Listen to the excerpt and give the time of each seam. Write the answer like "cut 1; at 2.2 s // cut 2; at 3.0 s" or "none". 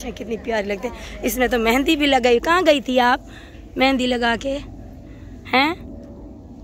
none